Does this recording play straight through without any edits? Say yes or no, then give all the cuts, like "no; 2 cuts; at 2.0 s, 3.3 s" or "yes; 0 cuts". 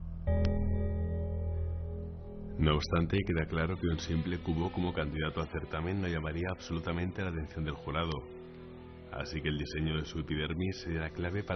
no; 1 cut; at 8.0 s